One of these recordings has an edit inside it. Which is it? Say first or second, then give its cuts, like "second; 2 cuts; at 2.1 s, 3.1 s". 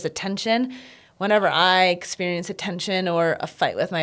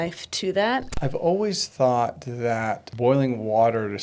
second; 2 cuts; at 0.9 s, 2.9 s